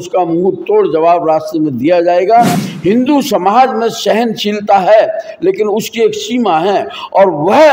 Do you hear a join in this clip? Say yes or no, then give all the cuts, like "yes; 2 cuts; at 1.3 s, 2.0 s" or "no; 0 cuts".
yes; 1 cut; at 2.6 s